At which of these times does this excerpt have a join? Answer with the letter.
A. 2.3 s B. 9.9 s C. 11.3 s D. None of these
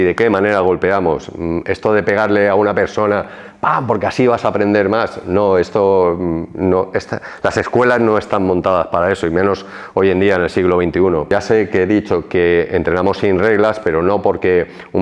C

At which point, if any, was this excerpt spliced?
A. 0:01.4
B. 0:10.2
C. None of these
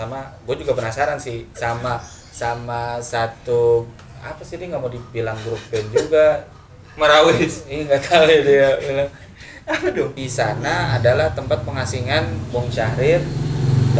B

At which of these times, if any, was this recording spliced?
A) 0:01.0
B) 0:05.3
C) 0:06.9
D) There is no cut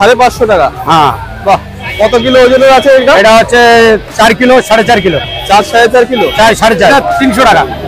C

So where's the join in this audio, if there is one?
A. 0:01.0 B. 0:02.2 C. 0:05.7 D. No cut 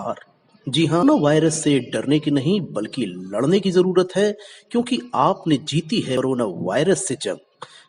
A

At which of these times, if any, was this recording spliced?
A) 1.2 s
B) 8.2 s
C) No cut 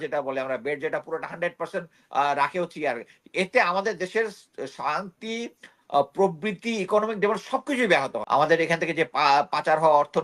B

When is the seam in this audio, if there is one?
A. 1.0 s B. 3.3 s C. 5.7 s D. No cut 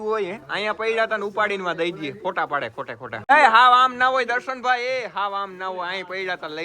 B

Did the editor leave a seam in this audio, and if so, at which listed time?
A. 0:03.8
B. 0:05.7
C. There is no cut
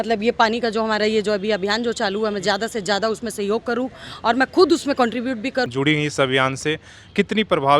B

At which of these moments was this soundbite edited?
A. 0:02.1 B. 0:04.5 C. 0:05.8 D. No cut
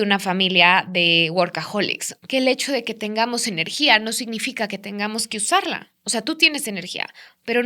A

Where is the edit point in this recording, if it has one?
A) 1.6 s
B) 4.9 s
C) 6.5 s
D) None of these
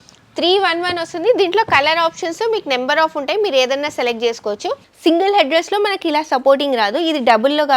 B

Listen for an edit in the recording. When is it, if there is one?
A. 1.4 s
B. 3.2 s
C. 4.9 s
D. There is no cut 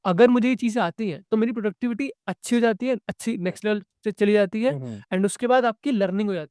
D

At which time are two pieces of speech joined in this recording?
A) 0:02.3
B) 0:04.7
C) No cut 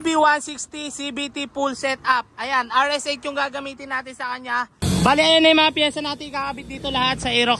B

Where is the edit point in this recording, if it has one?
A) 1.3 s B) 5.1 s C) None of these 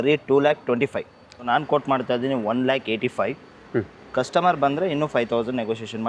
A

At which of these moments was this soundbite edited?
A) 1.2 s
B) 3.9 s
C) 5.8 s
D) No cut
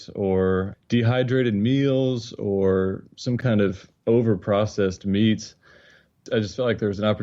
B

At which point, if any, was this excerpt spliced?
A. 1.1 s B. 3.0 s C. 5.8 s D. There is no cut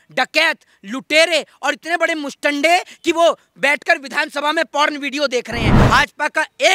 C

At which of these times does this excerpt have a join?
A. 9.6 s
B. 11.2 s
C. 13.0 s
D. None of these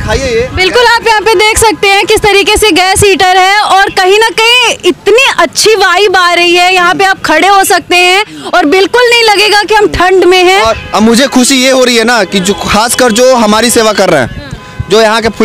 D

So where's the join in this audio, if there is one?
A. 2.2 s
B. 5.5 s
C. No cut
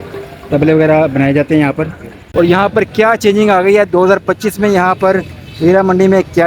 A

